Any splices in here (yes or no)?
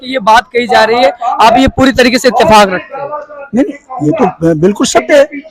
no